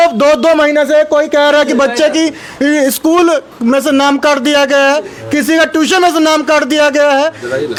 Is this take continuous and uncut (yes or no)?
yes